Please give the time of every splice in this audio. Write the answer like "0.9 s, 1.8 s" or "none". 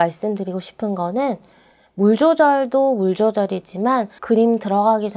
none